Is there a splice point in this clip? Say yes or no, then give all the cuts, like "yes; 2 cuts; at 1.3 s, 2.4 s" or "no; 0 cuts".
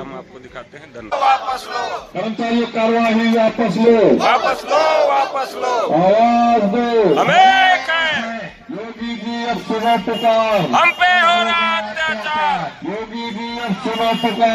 yes; 1 cut; at 1.1 s